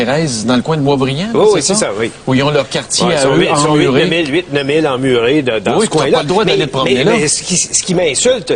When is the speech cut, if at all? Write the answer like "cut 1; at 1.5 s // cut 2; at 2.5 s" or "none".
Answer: cut 1; at 0.9 s